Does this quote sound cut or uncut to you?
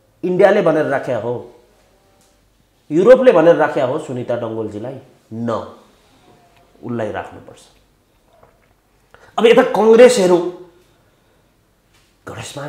uncut